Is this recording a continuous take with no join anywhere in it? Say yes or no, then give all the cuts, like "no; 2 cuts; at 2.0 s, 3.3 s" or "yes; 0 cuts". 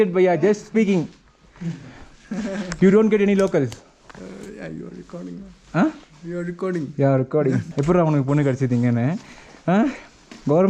no; 1 cut; at 7.7 s